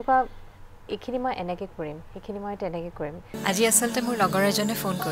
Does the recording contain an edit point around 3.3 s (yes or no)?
yes